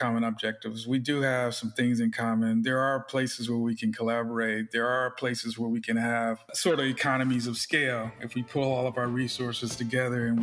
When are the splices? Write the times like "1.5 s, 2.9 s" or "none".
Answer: 6.5 s